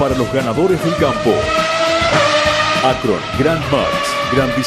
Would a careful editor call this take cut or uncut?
uncut